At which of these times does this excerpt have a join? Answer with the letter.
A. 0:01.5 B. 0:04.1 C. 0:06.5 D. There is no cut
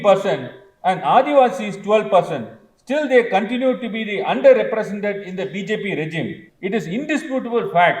C